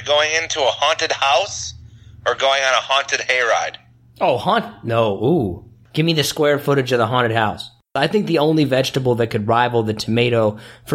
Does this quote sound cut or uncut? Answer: cut